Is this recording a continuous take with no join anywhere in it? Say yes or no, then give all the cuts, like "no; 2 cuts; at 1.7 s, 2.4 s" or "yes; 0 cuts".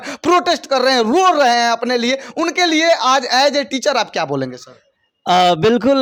yes; 0 cuts